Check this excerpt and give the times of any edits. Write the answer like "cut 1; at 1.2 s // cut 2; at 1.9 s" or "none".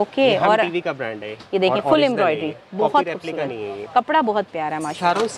none